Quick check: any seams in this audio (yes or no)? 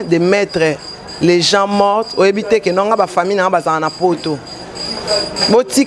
no